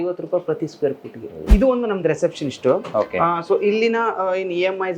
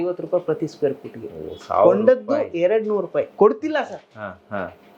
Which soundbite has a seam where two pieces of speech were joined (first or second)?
first